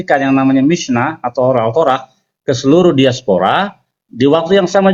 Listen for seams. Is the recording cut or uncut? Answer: uncut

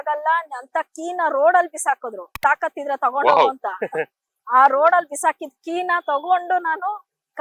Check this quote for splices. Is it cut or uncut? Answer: cut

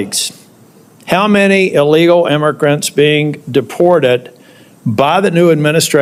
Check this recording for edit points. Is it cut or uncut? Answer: uncut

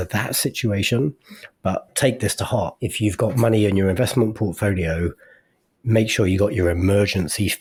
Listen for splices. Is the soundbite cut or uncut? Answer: uncut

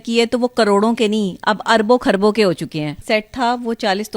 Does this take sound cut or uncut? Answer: cut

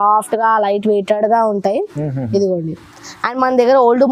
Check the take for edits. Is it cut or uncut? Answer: uncut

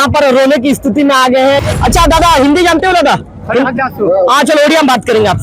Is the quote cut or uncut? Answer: cut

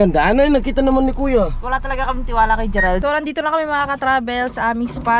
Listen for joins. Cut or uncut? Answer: cut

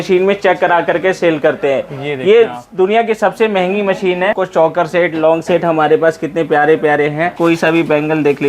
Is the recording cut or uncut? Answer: cut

